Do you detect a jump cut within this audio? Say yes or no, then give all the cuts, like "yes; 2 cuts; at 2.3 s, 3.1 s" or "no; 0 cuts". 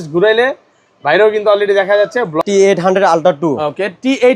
yes; 1 cut; at 2.3 s